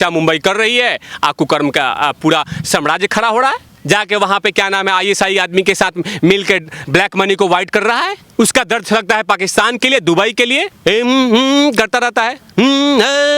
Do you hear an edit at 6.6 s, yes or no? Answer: no